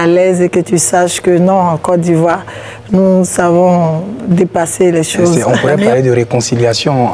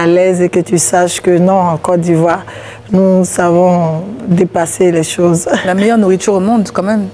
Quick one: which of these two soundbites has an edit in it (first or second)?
first